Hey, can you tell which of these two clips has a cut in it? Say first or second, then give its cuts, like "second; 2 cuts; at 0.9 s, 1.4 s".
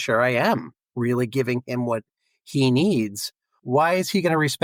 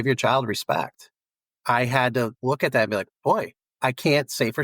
second; 3 cuts; at 1.5 s, 2.4 s, 3.7 s